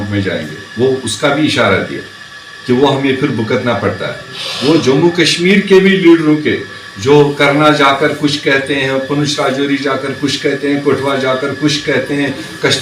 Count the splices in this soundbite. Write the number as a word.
zero